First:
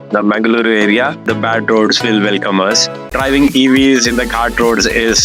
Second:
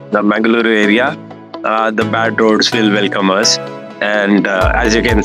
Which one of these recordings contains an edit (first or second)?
first